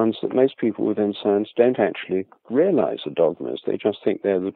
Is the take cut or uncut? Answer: uncut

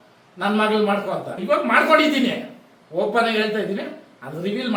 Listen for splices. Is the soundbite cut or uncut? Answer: cut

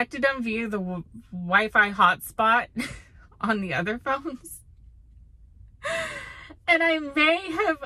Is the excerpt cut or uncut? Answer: uncut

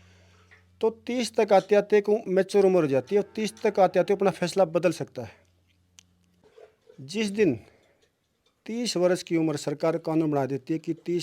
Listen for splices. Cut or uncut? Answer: cut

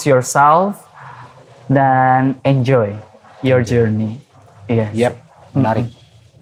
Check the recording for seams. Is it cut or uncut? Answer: uncut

